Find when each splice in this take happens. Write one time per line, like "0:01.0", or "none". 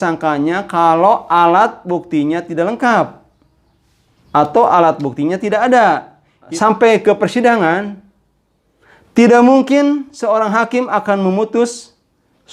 0:06.5

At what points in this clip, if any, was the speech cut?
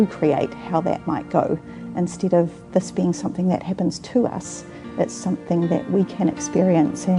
none

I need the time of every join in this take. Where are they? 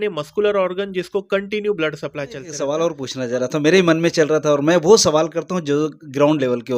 0:02.4

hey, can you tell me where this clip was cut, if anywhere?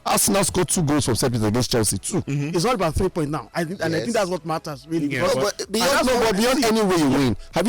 0:02.3

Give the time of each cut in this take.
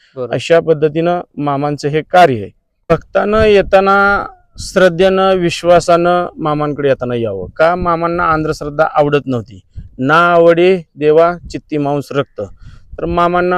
0:02.9

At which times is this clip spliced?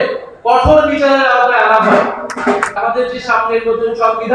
0:02.8

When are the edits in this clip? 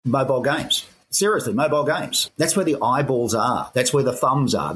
0:01.0
0:02.2

